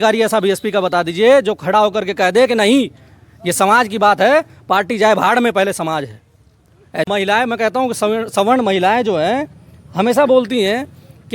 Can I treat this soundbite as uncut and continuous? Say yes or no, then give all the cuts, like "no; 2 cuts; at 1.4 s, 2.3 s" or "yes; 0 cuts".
no; 1 cut; at 7.1 s